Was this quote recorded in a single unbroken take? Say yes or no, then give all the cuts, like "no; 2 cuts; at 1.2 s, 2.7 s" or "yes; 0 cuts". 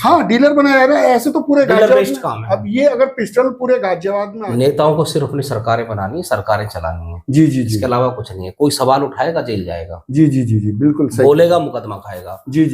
no; 1 cut; at 4.3 s